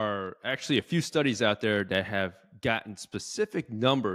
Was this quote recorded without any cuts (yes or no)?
yes